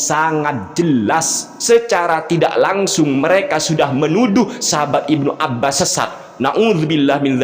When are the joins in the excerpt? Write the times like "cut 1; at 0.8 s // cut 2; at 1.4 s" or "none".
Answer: cut 1; at 1.5 s // cut 2; at 5.8 s